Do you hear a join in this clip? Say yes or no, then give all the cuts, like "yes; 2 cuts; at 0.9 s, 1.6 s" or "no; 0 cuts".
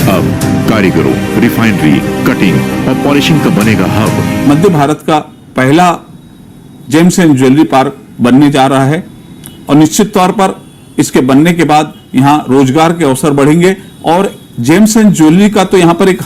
yes; 1 cut; at 1.9 s